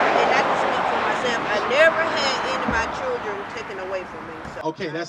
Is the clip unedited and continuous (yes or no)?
yes